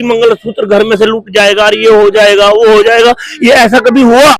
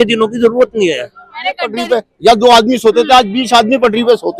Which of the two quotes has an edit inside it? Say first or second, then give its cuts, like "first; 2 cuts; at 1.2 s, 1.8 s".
second; 1 cut; at 1.7 s